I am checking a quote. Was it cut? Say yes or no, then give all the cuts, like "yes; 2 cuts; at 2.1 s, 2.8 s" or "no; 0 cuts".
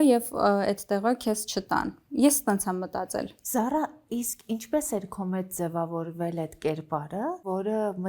no; 0 cuts